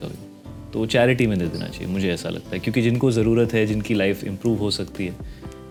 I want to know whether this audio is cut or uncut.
uncut